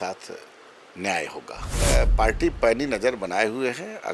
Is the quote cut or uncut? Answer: cut